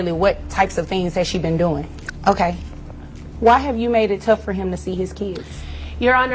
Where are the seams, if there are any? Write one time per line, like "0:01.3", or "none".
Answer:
0:01.9